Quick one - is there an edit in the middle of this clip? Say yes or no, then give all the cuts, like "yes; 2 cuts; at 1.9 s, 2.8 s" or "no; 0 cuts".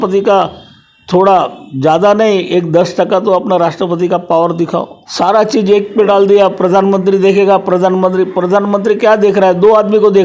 yes; 1 cut; at 5.0 s